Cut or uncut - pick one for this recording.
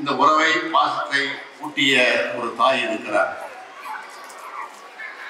uncut